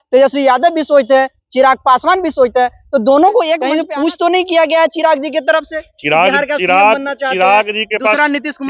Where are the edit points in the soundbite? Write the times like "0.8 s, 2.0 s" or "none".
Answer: 3.8 s